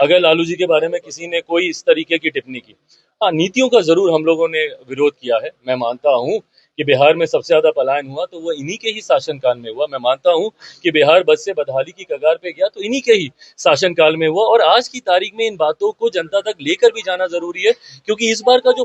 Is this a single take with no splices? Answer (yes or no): yes